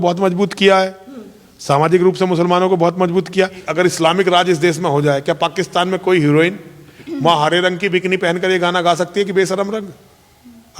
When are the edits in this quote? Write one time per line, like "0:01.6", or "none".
0:03.7